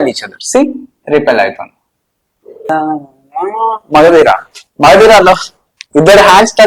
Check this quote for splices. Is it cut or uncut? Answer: cut